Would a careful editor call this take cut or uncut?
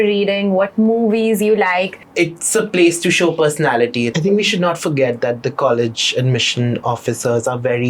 cut